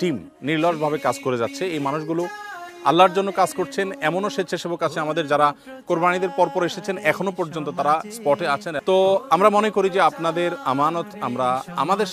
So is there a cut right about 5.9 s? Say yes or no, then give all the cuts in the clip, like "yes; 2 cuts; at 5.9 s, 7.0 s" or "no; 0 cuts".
no; 1 cut; at 8.7 s